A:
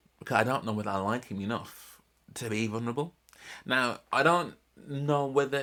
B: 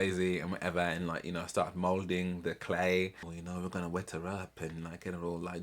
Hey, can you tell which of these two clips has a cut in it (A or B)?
B